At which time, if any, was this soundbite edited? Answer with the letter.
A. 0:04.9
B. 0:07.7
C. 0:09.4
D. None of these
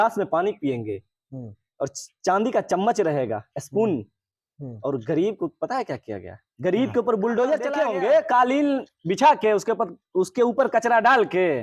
B